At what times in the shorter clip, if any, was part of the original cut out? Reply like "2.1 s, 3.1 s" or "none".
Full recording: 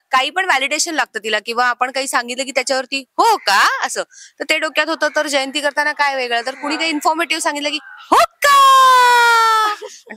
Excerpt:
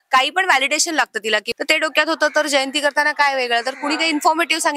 1.5 s